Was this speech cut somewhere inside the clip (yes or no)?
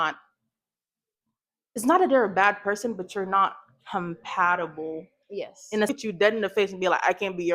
yes